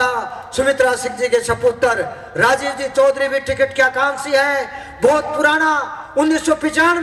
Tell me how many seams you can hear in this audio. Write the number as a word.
zero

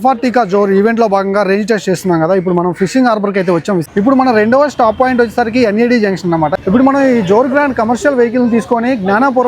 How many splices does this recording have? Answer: two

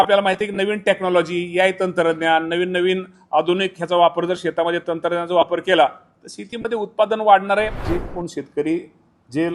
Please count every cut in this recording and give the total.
one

